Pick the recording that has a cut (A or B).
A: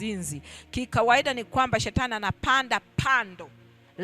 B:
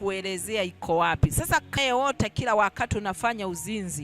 B